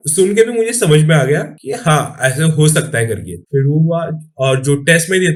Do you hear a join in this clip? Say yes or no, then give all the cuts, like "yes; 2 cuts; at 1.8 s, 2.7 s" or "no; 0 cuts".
no; 0 cuts